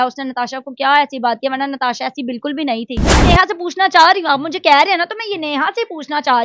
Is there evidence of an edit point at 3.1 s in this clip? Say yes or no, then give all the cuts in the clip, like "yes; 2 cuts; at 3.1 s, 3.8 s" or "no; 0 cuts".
yes; 1 cut; at 3.1 s